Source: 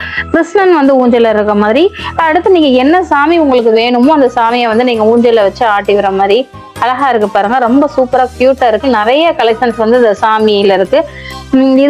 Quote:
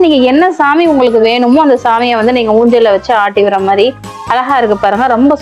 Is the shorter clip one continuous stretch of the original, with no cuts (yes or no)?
yes